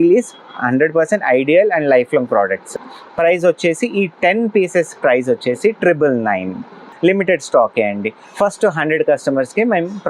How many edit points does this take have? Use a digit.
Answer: 2